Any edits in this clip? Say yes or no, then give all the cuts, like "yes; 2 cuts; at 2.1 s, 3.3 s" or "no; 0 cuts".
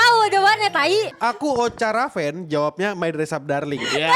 yes; 1 cut; at 1.1 s